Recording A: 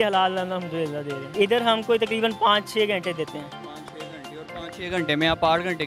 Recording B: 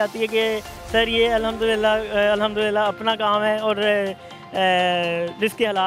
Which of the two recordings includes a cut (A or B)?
A